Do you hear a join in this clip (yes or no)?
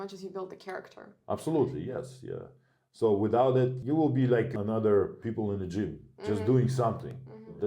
yes